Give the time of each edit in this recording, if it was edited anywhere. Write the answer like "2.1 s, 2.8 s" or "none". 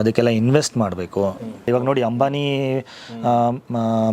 1.6 s